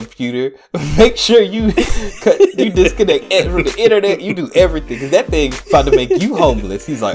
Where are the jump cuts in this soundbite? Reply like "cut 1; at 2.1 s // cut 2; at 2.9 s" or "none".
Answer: cut 1; at 5.6 s